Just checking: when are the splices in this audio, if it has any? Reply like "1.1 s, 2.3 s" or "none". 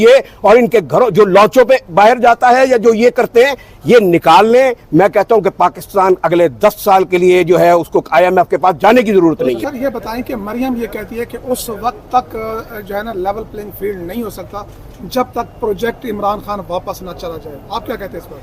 9.6 s